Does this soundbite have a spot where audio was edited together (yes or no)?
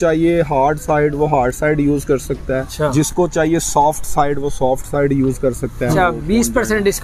yes